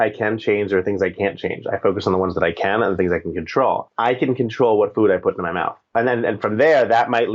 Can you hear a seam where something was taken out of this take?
yes; 2 cuts; at 3.9 s, 5.9 s

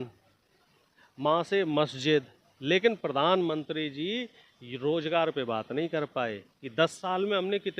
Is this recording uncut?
yes; 0 cuts

